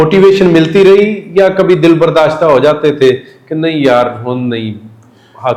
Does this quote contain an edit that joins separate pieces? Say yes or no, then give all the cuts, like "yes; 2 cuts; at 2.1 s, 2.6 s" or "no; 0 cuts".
no; 0 cuts